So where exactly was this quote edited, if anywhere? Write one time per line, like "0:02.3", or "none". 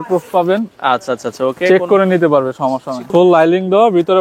0:03.1